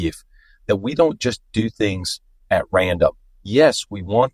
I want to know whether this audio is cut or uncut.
cut